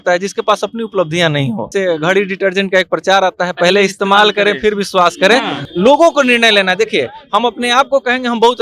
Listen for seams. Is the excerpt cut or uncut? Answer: cut